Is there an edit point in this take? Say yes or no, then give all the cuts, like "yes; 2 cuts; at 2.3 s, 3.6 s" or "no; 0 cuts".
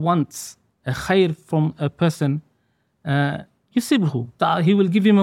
yes; 1 cut; at 4.3 s